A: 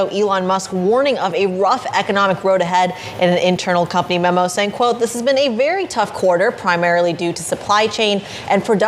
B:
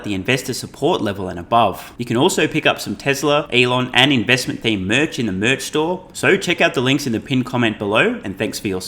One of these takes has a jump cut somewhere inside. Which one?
B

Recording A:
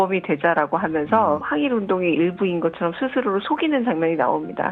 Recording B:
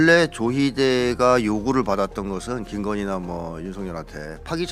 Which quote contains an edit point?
A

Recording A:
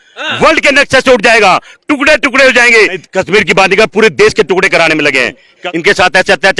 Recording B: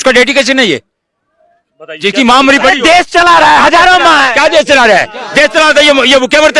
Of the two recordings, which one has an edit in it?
A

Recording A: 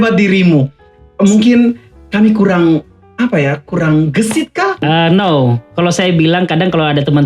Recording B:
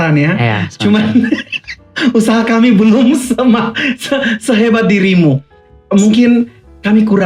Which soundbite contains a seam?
A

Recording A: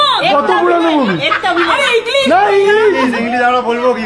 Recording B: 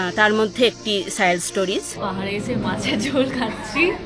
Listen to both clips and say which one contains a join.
B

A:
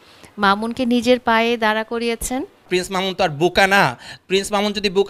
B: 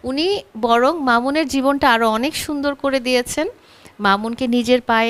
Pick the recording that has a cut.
A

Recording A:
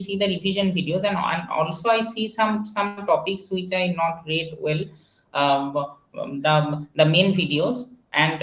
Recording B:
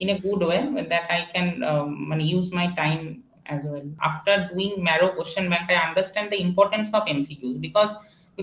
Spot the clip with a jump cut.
B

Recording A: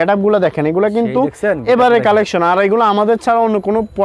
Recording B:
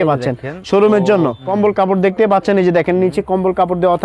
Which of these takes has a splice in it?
B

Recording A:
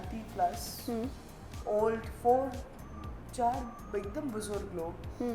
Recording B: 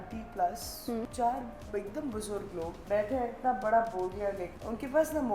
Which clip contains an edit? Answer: B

